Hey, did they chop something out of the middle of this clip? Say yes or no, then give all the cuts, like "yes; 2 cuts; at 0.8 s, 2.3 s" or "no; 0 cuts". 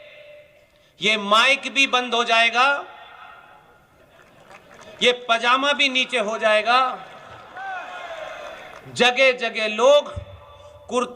yes; 1 cut; at 7.4 s